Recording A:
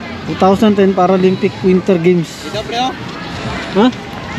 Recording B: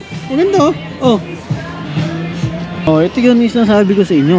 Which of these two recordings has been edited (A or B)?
B